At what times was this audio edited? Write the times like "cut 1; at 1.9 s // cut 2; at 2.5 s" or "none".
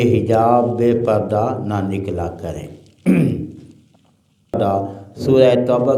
cut 1; at 4.5 s

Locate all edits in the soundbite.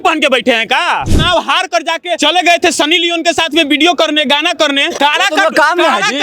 cut 1; at 1.1 s // cut 2; at 2.2 s // cut 3; at 4.9 s

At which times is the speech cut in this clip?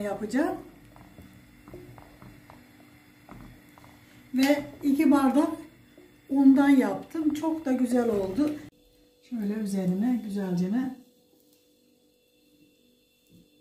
cut 1; at 8.7 s

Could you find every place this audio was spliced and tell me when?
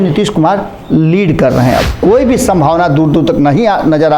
cut 1; at 1.9 s

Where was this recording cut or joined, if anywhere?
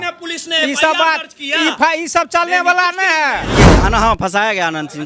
cut 1; at 3.5 s

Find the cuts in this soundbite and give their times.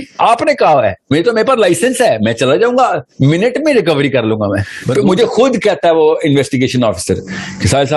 cut 1; at 4.8 s

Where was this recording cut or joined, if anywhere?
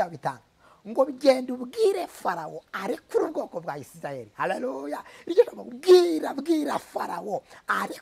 none

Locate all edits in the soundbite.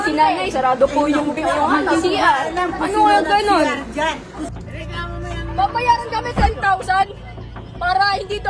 cut 1; at 4.5 s

